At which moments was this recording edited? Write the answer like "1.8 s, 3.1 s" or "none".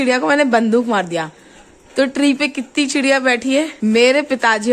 3.7 s